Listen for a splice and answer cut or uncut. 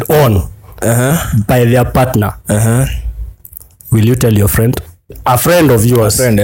cut